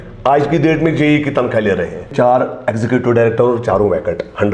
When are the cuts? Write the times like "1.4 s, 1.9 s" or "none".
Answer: 2.1 s

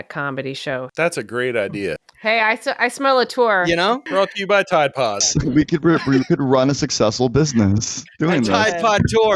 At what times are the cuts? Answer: 0.9 s, 2.1 s, 4.0 s

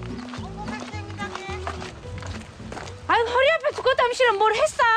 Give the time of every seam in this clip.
none

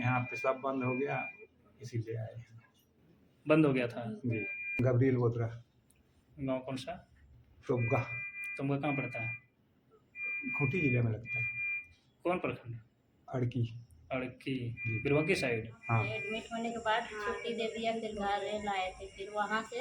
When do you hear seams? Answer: 4.6 s, 16.2 s

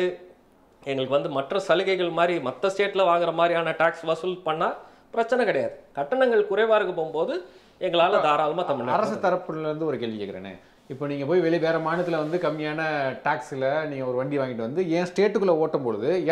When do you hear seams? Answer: none

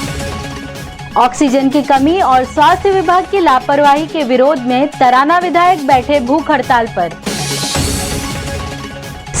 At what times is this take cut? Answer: 1.0 s

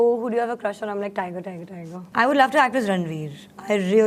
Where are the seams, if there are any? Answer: 2.0 s

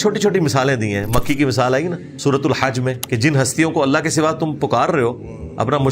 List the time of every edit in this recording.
2.1 s, 3.0 s

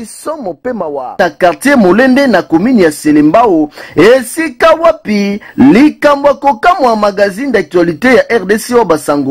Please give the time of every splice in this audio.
1.2 s

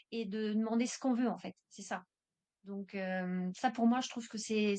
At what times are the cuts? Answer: none

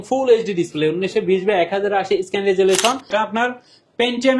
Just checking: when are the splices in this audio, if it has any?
3.1 s

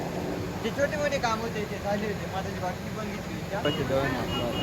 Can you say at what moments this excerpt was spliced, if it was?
3.6 s

